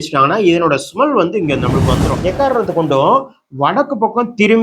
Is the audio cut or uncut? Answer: cut